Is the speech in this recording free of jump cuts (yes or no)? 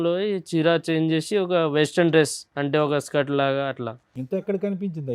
yes